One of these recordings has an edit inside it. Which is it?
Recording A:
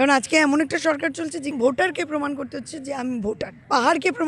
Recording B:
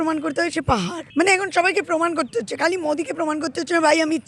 B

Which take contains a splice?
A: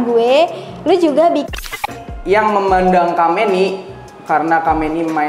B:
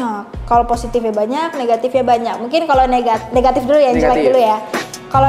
A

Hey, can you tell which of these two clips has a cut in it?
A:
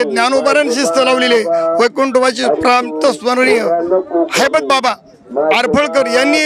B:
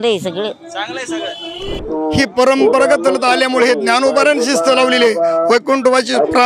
B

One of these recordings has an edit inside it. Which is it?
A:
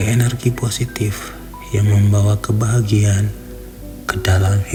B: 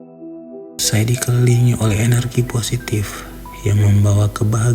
B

